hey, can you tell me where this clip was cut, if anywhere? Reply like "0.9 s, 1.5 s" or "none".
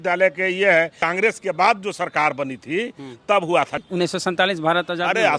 1.0 s, 3.8 s